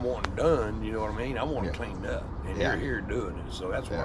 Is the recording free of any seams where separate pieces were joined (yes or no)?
yes